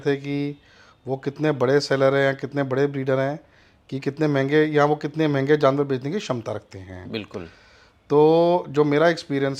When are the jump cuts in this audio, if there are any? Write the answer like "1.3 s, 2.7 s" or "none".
none